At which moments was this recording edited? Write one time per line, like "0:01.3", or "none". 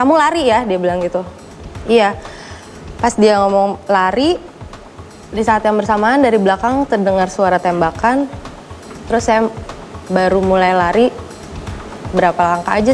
none